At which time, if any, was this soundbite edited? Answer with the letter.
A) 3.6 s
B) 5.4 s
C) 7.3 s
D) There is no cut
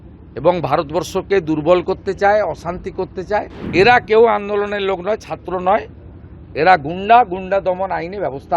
A